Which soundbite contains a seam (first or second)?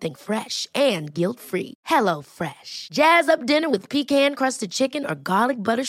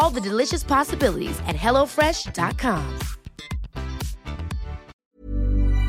second